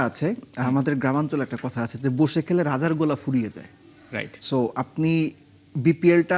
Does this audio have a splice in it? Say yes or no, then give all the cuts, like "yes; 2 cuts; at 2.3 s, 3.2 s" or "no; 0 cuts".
no; 0 cuts